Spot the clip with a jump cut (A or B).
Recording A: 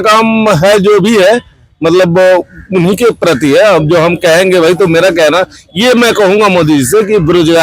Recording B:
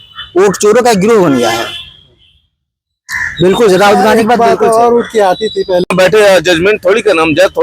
B